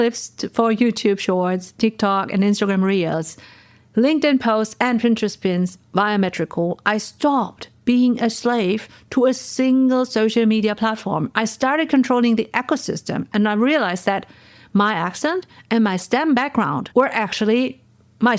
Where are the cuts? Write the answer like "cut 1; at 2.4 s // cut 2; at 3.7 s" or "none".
none

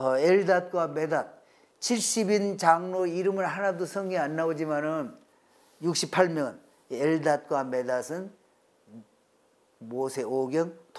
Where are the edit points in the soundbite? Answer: none

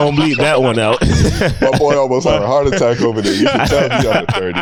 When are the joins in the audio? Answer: none

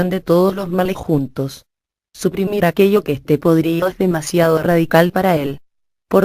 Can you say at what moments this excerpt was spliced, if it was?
none

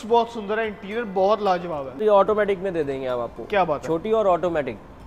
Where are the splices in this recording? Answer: cut 1; at 2.0 s

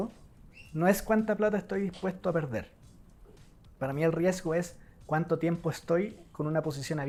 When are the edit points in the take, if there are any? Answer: none

